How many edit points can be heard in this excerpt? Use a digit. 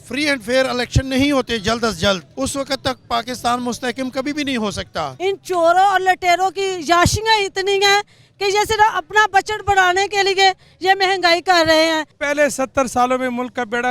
3